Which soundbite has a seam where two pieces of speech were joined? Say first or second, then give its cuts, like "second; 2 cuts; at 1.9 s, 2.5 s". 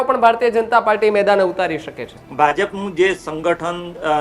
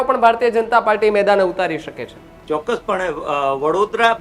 first; 1 cut; at 2.2 s